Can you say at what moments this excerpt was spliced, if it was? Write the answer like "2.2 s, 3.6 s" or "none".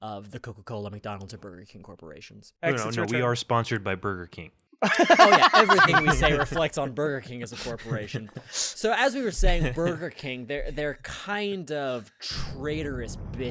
none